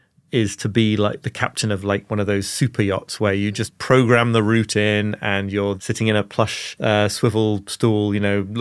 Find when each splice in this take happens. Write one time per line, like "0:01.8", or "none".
0:05.8
0:06.7